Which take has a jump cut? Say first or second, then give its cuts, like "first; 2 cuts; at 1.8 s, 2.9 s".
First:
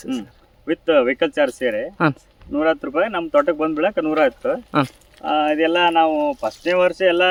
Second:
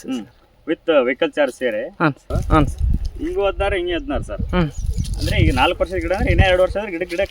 second; 1 cut; at 2.3 s